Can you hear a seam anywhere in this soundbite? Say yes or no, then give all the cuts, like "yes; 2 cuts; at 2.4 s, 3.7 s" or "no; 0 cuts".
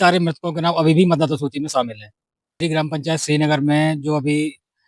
yes; 1 cut; at 2.6 s